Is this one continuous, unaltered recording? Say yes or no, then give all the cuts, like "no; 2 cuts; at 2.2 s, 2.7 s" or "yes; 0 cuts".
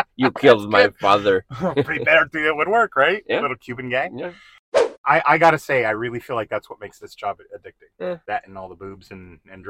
no; 2 cuts; at 4.5 s, 8.1 s